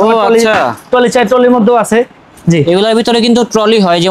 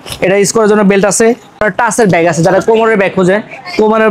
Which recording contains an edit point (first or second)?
second